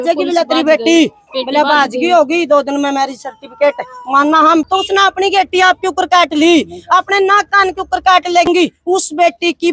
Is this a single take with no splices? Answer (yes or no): no